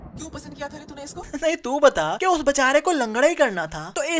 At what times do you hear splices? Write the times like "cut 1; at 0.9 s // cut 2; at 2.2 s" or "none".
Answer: cut 1; at 1.3 s